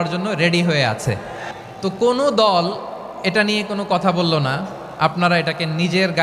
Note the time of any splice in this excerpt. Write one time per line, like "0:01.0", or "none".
0:01.5